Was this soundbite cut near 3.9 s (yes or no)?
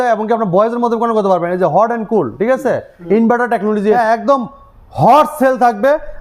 yes